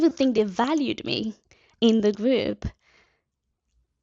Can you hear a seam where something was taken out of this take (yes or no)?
no